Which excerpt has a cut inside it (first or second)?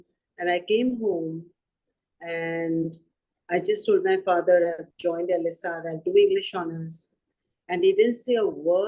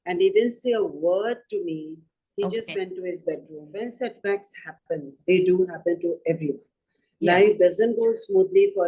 second